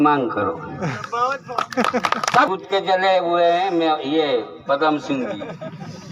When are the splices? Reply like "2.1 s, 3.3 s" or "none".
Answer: 2.5 s